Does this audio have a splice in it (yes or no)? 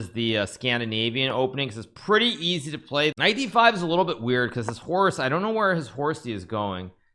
yes